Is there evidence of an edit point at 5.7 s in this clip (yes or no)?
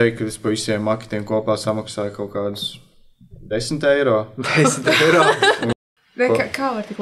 yes